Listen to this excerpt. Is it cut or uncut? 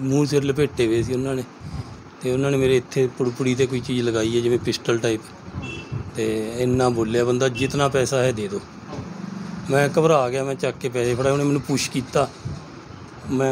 uncut